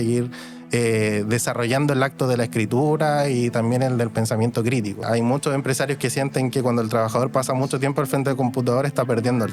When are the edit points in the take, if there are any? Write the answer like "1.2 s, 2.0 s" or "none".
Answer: 5.4 s